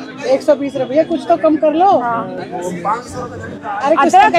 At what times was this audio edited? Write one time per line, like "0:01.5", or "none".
none